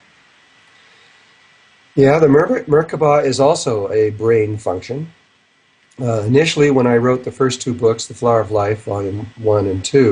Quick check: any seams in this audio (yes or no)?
no